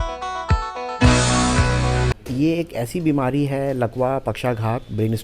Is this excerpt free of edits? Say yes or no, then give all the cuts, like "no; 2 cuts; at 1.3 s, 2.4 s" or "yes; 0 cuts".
no; 1 cut; at 2.2 s